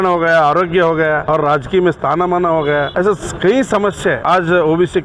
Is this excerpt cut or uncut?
cut